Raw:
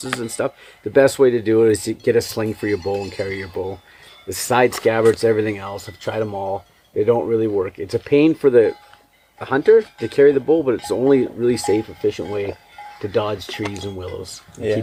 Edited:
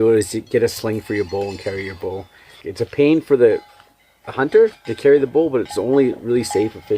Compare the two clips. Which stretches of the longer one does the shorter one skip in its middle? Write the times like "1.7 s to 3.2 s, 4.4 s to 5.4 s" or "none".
4.2 s to 7.8 s

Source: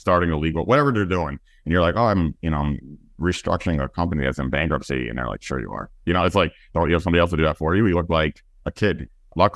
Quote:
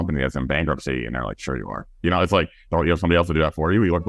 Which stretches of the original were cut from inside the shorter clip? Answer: none

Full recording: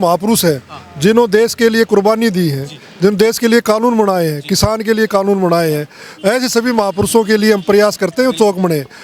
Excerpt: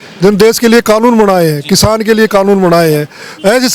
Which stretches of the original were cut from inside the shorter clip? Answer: none

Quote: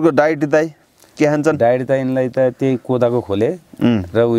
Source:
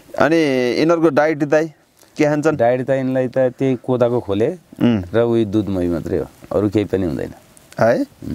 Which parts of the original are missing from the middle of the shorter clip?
none

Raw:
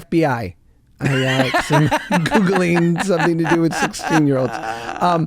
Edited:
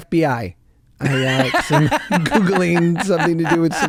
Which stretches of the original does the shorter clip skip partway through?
none

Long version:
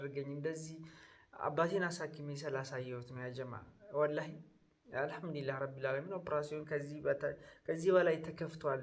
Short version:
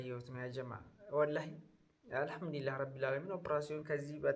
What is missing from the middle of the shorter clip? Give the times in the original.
none

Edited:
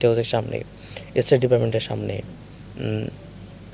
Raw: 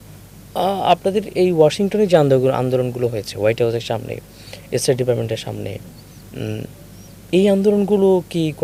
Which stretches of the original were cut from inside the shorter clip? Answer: none

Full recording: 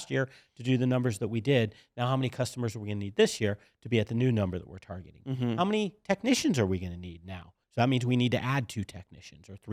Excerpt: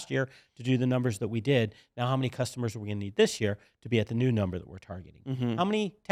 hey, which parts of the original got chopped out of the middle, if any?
none

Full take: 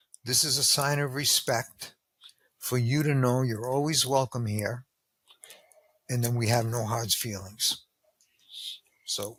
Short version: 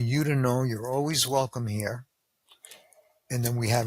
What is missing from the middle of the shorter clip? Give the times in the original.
none

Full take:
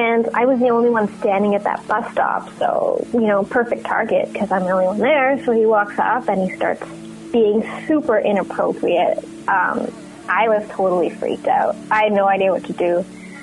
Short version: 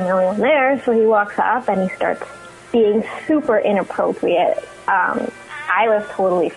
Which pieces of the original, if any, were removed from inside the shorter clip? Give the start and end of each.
none

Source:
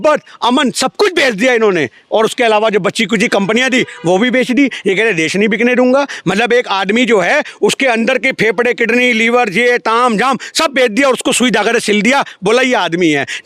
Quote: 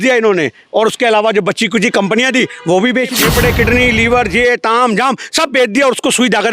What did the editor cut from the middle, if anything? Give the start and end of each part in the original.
4.5 s to 8.3 s

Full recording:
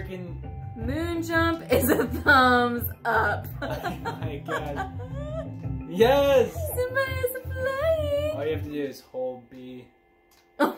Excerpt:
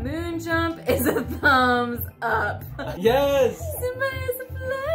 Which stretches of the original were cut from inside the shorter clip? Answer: 3.7 s to 5.9 s

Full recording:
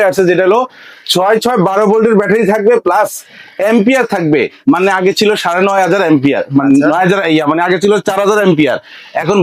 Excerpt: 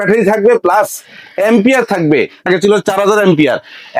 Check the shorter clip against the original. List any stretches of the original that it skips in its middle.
4.6 s to 7.6 s

